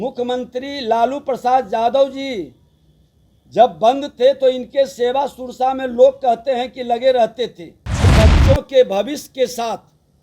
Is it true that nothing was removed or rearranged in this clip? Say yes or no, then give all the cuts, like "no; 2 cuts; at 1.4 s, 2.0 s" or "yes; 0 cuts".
no; 1 cut; at 8.1 s